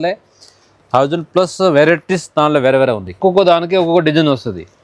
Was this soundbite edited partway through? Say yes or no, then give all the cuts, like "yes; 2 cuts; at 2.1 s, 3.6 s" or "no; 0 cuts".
yes; 1 cut; at 3.1 s